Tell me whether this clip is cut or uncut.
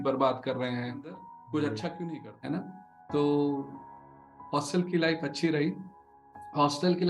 cut